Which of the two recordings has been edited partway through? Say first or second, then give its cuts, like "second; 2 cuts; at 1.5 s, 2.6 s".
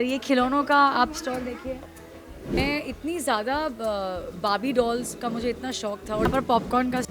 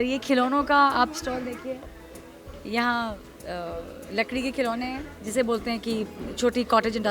first; 2 cuts; at 2.6 s, 6.3 s